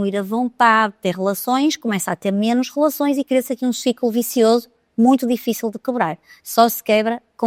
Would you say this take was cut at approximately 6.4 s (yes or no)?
no